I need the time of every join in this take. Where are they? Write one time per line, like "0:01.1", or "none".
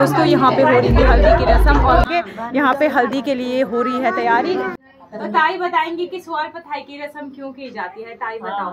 0:02.1
0:04.8